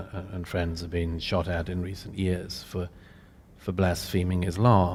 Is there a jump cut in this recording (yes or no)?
no